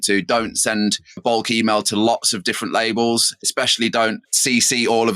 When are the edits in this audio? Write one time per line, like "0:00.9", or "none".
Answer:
0:03.4